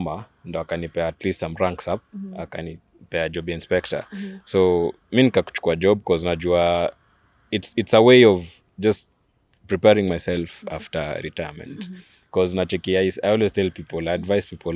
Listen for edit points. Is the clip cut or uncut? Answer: uncut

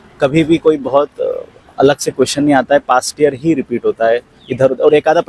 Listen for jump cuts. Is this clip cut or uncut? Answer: uncut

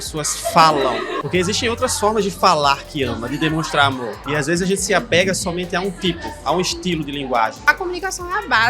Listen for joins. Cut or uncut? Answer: cut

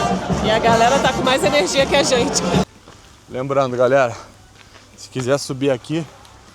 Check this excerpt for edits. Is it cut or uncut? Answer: cut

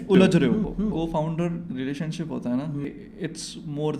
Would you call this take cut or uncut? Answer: cut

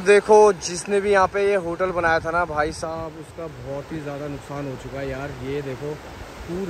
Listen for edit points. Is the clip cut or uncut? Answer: uncut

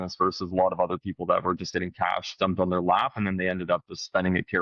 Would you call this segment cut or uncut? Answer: uncut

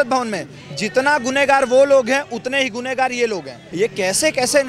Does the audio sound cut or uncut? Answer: cut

